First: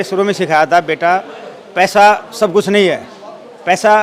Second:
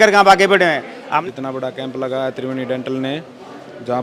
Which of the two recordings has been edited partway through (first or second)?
second